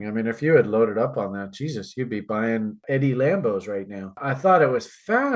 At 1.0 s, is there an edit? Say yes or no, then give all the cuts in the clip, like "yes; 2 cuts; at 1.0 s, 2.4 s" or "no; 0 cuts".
no; 2 cuts; at 2.8 s, 4.2 s